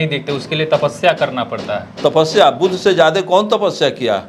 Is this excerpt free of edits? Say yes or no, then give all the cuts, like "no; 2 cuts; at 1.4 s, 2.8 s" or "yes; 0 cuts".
yes; 0 cuts